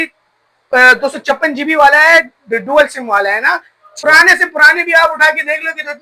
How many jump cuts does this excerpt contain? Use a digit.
1